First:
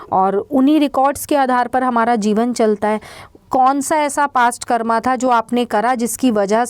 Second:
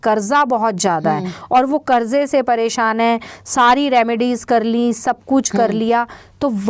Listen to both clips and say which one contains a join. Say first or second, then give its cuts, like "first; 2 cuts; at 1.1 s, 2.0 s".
first; 1 cut; at 3.3 s